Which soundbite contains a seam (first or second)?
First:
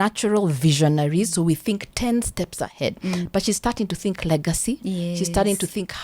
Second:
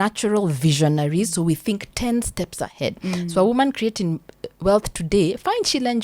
first